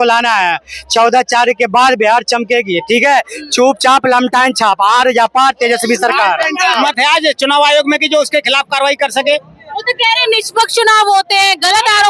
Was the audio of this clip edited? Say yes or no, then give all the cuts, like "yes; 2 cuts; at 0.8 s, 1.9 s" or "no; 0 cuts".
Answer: yes; 1 cut; at 6.8 s